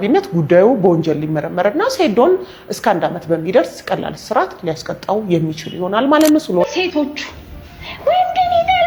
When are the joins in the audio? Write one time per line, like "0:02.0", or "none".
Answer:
0:06.6